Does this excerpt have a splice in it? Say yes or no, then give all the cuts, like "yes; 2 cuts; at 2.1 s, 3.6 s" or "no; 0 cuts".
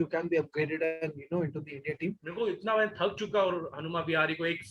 yes; 1 cut; at 2.2 s